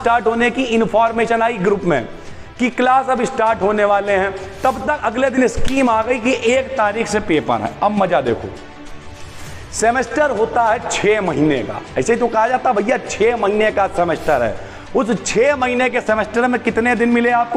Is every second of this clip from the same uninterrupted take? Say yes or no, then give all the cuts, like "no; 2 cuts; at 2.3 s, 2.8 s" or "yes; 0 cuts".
yes; 0 cuts